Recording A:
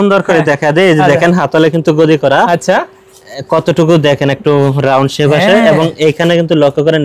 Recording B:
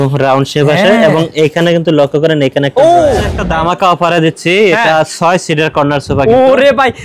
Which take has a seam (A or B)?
B